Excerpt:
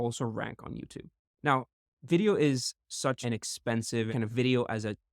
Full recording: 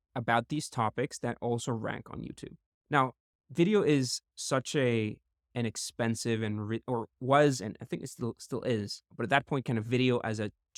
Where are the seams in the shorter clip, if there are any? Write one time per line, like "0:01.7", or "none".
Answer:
0:03.2
0:04.1